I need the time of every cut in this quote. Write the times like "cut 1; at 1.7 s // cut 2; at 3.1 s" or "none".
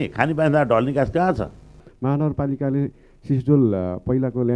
cut 1; at 1.8 s

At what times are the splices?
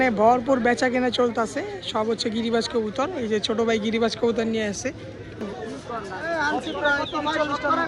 cut 1; at 5.5 s

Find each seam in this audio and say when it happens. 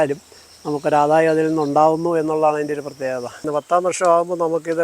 cut 1; at 3.4 s

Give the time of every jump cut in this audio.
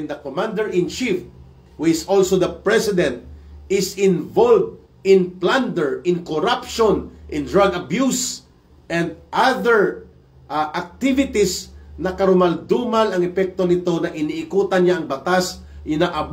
none

